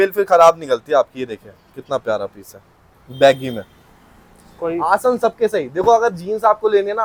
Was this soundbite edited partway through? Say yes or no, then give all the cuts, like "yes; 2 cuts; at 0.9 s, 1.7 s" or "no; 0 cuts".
no; 0 cuts